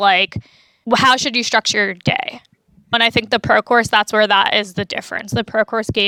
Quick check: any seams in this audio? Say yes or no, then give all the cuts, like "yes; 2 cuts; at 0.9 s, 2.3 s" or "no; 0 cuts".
no; 0 cuts